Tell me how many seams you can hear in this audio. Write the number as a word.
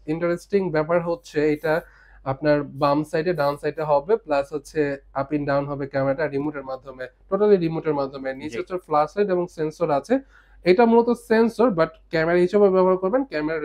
zero